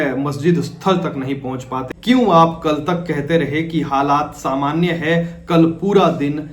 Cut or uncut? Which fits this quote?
cut